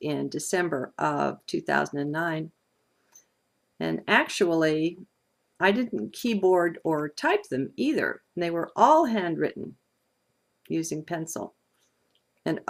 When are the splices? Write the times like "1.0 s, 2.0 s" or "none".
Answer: 2.6 s